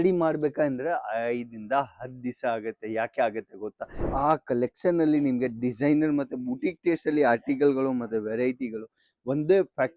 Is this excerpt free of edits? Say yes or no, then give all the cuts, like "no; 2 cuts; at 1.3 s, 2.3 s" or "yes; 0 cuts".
no; 1 cut; at 4.0 s